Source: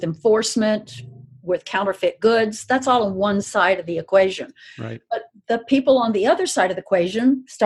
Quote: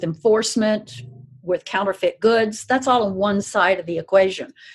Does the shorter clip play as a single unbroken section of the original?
yes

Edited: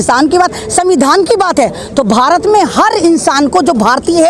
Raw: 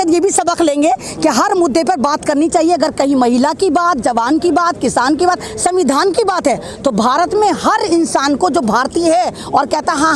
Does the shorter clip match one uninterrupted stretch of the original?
yes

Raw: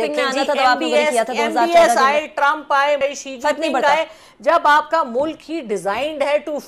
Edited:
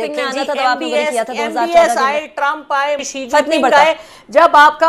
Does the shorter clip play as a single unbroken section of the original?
no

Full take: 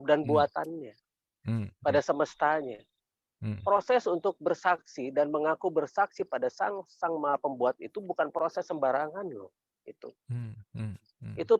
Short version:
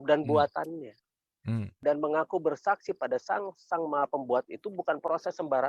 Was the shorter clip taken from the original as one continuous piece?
no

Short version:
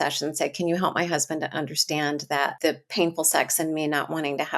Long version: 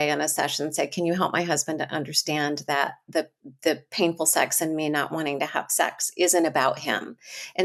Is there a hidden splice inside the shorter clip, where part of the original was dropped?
yes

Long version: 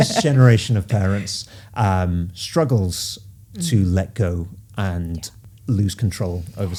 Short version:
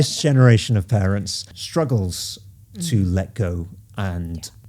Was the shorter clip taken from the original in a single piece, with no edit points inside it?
no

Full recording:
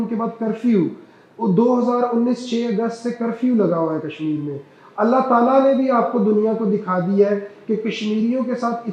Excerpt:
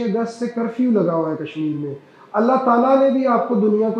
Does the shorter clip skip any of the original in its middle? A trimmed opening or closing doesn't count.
no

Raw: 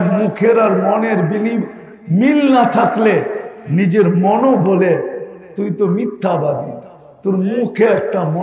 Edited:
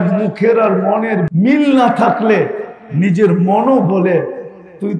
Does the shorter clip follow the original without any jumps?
no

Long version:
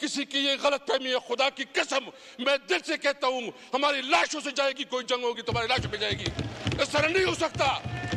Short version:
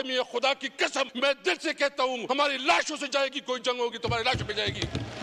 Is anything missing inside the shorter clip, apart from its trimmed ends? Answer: yes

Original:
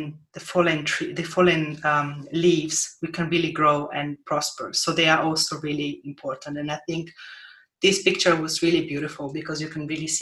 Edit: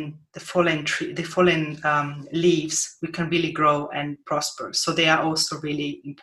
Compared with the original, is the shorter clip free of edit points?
yes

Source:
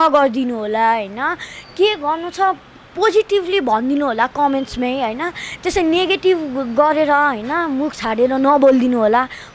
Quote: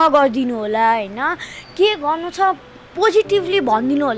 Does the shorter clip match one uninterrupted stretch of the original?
yes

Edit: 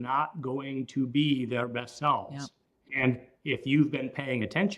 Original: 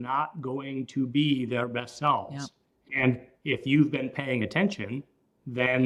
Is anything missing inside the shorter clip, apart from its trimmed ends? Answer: no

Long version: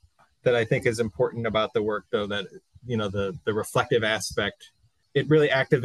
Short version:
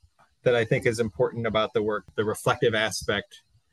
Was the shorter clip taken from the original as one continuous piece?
no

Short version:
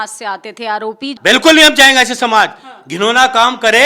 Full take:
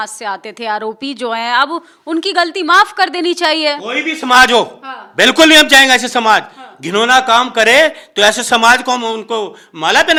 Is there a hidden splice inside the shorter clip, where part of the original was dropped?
yes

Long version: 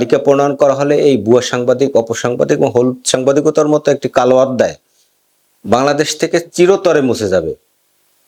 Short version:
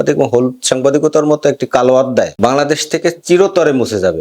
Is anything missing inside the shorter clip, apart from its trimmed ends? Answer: yes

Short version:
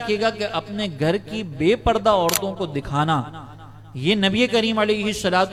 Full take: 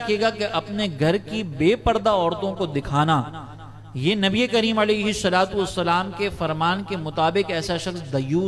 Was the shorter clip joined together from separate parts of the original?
no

